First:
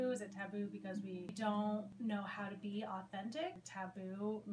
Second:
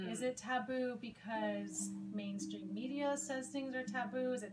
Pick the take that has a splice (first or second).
first